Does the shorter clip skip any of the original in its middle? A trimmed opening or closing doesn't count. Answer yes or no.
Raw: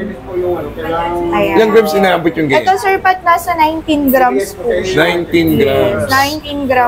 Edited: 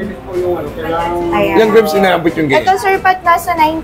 no